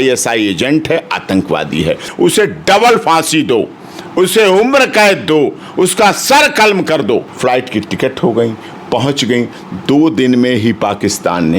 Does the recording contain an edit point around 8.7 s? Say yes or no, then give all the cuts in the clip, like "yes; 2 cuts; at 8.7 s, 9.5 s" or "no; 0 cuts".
no; 2 cuts; at 2.1 s, 7.3 s